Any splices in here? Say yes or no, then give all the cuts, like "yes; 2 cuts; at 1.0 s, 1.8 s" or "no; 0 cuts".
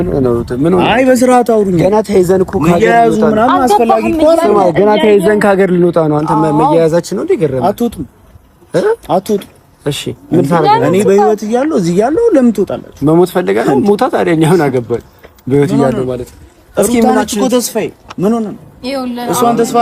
no; 0 cuts